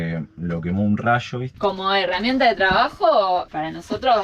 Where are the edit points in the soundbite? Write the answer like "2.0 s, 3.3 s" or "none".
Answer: 1.5 s